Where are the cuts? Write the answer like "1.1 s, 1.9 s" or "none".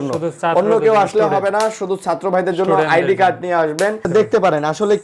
4.1 s